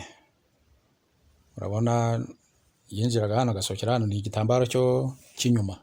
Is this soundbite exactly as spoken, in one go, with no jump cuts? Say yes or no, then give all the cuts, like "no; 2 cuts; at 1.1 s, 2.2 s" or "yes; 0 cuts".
yes; 0 cuts